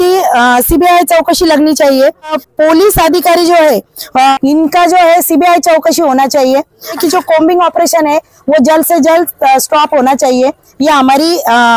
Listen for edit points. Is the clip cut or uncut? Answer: cut